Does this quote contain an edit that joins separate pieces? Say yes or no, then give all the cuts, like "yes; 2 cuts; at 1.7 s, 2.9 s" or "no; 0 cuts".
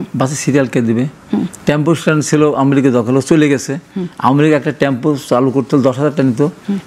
no; 0 cuts